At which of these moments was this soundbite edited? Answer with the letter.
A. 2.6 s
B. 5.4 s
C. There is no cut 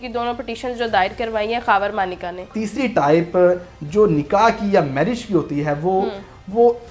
A